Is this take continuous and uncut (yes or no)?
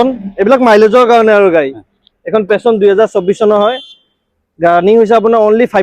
yes